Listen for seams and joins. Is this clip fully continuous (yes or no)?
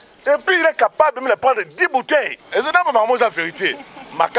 no